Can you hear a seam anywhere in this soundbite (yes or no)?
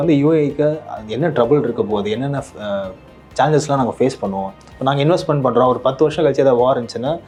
no